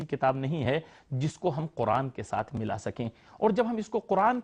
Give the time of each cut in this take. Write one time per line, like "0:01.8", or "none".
none

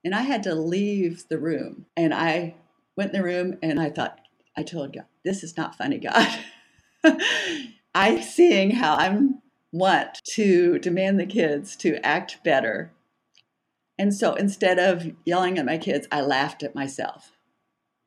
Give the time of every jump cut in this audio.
0:01.8
0:10.2

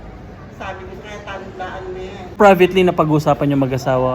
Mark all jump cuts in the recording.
0:02.4

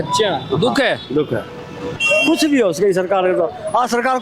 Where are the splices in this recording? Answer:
0:02.0

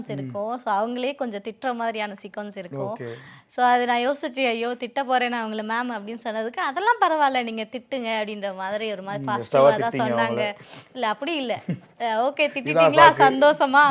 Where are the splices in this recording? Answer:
none

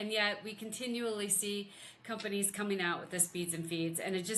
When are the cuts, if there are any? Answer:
none

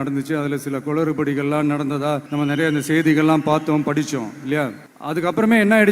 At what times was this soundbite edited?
0:02.3
0:04.9

